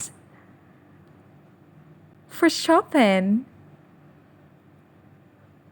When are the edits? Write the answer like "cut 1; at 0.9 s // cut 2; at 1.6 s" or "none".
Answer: cut 1; at 2.2 s